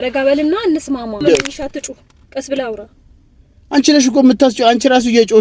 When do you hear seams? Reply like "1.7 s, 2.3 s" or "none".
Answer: 1.2 s